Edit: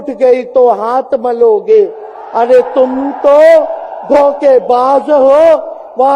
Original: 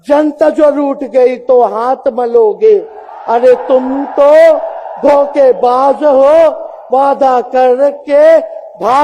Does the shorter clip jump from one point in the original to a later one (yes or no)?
no